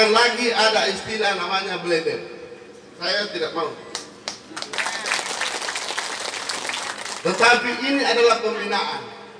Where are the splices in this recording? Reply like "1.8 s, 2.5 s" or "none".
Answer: none